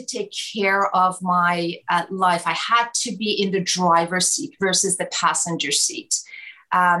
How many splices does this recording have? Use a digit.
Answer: 0